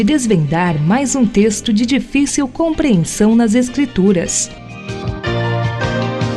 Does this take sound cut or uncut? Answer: cut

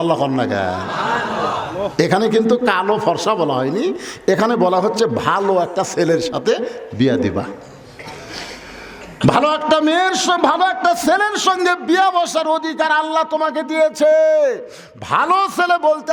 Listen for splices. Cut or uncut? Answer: uncut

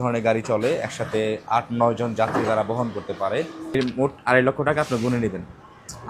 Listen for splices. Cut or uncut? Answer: cut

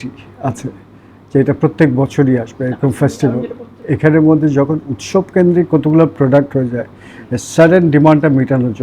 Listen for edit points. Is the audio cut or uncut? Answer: uncut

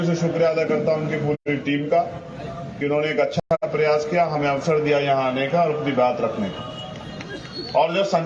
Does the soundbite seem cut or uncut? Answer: uncut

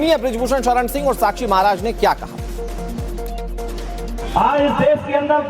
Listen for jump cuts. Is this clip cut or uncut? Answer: cut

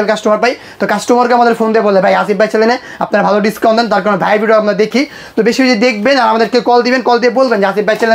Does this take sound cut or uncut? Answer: uncut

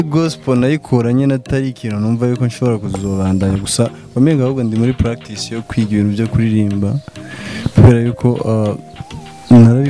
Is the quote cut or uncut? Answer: uncut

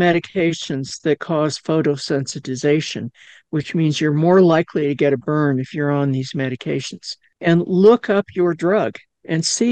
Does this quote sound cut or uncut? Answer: cut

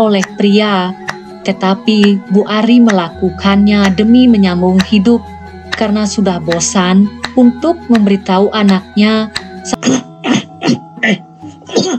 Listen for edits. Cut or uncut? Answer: cut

